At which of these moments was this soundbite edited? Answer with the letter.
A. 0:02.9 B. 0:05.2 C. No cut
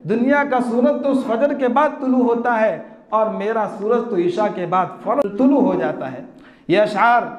B